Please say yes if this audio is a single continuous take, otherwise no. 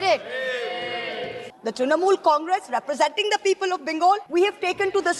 no